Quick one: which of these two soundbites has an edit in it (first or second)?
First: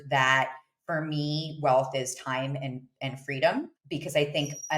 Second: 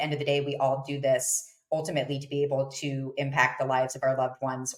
first